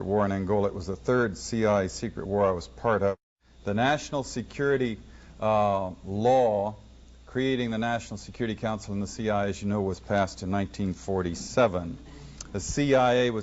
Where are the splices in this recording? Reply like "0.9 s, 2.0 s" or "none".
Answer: 8.1 s